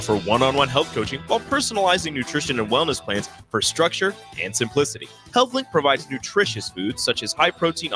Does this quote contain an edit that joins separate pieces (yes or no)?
no